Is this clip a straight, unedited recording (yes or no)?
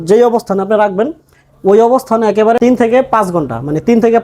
no